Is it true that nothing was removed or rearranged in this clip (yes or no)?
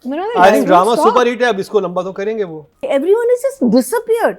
no